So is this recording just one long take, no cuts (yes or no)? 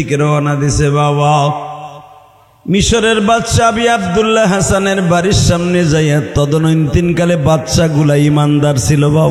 yes